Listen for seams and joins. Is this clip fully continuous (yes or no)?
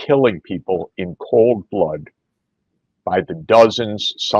yes